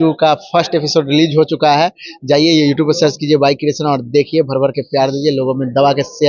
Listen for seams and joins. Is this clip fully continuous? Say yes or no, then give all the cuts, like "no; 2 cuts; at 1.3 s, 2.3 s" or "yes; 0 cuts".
yes; 0 cuts